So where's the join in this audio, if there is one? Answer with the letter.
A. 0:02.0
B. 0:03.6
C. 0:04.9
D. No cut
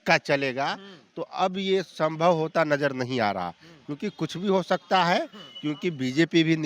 D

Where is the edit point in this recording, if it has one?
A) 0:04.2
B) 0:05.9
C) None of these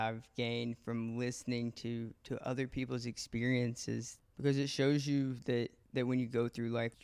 A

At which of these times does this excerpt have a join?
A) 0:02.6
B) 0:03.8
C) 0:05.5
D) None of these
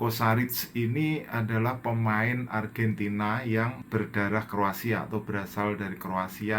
B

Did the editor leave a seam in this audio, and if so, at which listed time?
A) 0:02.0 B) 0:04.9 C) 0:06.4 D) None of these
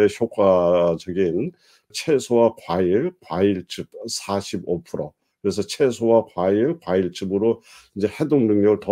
A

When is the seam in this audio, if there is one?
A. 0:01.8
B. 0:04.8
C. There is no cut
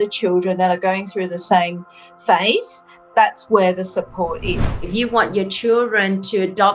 B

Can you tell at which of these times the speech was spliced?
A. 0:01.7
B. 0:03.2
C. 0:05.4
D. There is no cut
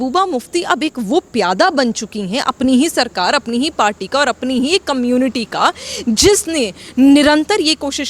D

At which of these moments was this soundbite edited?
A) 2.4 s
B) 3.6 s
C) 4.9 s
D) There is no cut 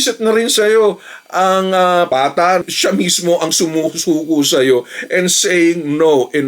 A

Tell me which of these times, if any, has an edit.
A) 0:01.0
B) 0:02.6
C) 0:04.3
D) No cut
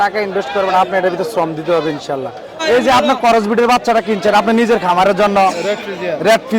B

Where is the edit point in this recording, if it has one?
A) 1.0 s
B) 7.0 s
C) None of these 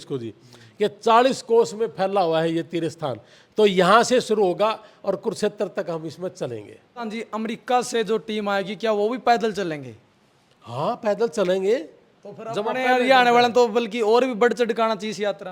B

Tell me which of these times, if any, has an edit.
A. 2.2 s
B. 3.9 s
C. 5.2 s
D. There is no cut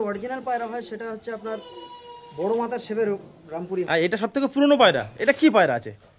B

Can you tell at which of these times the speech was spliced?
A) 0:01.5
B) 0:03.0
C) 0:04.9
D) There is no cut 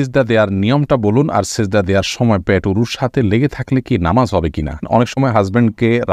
C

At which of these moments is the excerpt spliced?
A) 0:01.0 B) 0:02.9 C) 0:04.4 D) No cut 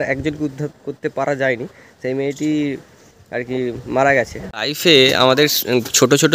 C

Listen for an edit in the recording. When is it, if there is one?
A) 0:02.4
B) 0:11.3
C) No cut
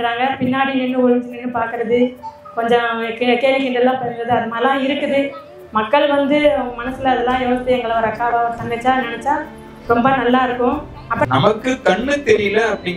B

